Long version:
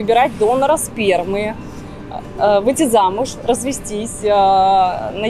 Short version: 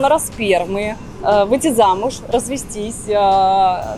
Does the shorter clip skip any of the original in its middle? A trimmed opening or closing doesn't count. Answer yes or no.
yes